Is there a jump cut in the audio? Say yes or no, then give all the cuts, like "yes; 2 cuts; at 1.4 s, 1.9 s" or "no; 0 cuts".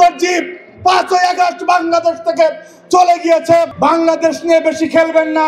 yes; 1 cut; at 3.7 s